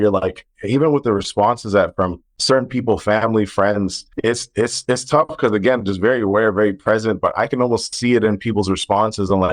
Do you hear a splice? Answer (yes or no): yes